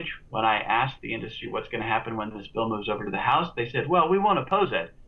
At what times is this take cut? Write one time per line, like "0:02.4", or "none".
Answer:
none